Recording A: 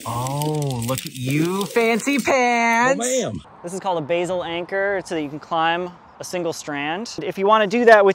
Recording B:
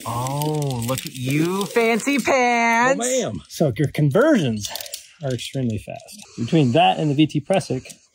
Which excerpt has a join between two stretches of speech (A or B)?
A